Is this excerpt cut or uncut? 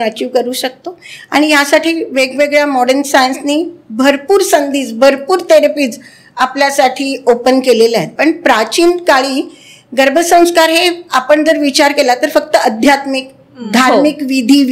cut